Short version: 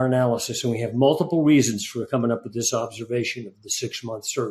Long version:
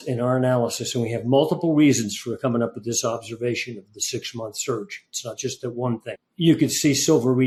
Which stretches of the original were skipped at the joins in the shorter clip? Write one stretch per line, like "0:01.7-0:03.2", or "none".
none

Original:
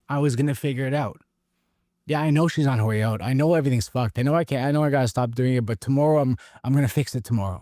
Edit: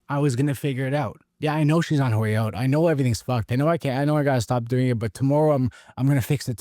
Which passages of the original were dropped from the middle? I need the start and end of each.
0:01.2-0:01.9

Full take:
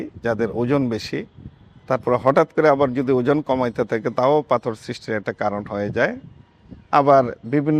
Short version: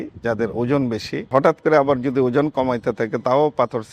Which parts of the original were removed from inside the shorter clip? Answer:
0:01.3-0:02.2

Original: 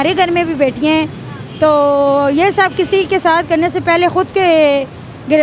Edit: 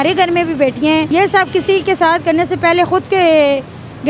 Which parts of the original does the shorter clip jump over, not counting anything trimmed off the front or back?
0:01.1-0:02.3

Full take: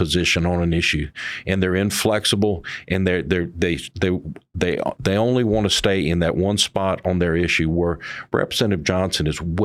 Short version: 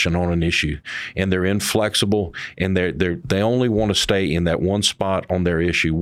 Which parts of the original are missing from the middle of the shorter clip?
0:03.5-0:05.0

